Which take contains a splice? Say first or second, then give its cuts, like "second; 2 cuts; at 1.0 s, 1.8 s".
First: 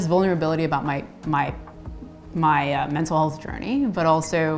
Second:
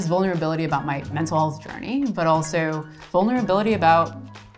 second; 1 cut; at 1.1 s